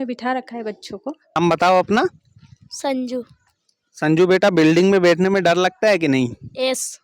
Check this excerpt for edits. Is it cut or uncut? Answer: cut